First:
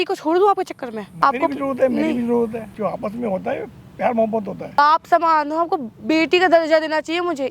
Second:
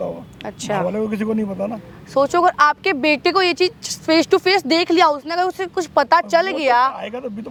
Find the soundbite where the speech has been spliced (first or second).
first